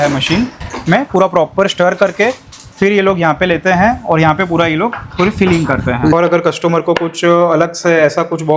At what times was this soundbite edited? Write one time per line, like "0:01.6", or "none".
0:06.1

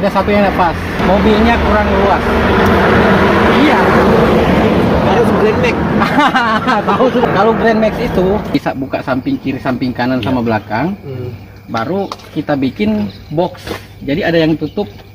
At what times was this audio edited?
0:01.0
0:07.3
0:08.5

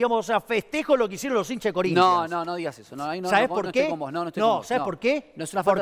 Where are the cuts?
none

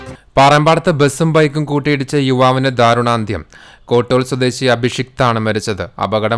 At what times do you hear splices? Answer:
none

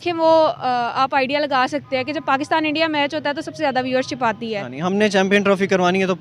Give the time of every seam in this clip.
0:04.7

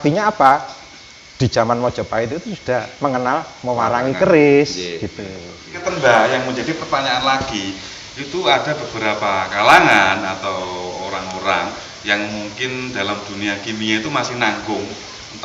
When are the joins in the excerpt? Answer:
0:05.8

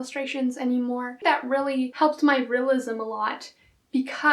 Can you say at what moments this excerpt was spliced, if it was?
0:01.2

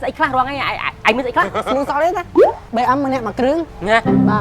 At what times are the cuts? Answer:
0:01.6
0:02.6

